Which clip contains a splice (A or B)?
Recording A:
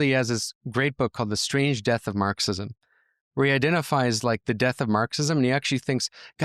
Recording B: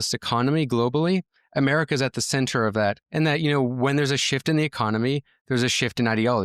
B